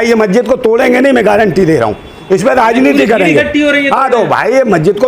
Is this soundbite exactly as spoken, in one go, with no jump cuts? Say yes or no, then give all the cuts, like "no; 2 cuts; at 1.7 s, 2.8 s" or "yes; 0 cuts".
yes; 0 cuts